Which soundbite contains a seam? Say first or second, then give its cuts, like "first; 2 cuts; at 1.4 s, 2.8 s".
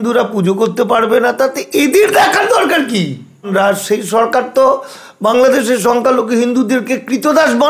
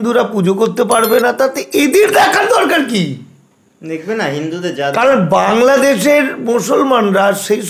first; 1 cut; at 3.5 s